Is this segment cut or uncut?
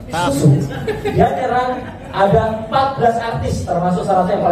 uncut